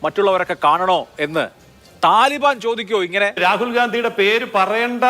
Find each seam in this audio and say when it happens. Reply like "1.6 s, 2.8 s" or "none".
3.4 s